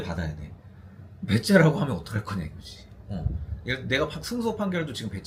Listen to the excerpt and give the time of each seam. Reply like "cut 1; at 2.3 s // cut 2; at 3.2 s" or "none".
none